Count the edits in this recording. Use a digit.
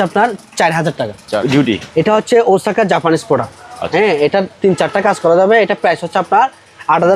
1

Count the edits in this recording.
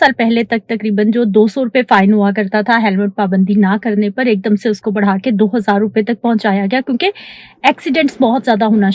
0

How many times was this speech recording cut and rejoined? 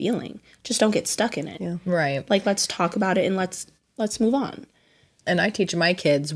1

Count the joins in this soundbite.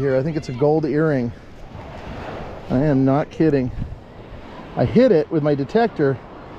0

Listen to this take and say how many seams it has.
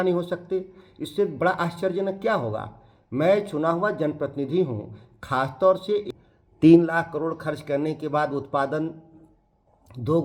1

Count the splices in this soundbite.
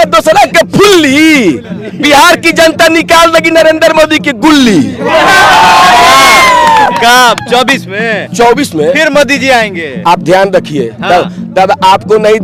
0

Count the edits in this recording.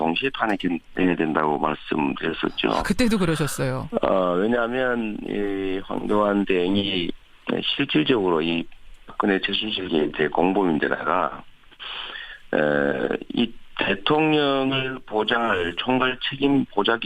1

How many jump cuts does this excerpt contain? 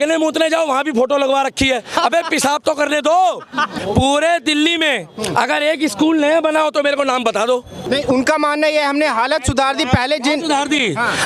2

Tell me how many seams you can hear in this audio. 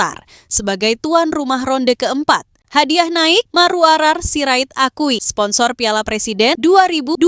1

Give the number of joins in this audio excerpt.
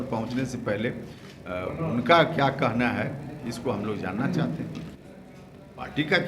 1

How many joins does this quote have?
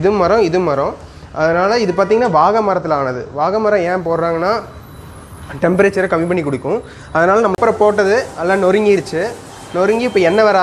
1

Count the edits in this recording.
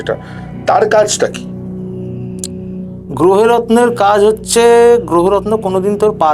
0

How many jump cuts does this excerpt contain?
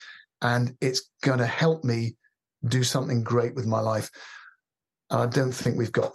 0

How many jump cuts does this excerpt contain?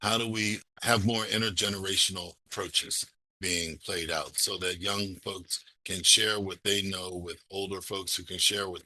0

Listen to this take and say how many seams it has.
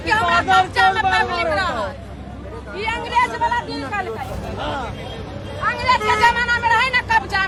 0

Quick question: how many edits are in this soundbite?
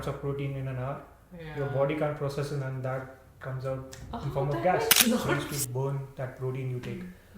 1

